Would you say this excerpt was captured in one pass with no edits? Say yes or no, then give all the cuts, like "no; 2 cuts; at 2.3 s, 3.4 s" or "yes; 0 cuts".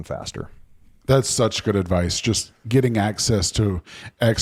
yes; 0 cuts